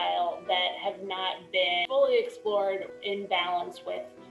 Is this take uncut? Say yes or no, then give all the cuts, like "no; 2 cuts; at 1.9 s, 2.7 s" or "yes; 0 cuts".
yes; 0 cuts